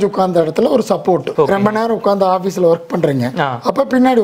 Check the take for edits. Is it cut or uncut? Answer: uncut